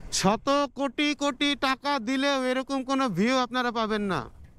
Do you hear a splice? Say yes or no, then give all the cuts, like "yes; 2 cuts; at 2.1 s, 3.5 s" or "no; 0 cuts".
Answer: no; 0 cuts